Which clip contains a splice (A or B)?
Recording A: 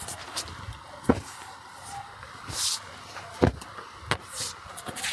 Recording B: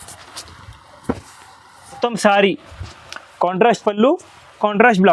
B